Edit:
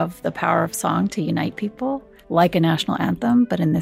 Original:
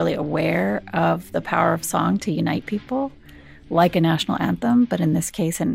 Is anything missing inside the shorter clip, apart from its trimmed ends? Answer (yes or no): yes